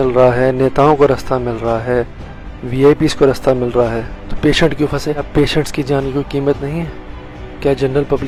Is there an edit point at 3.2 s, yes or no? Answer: no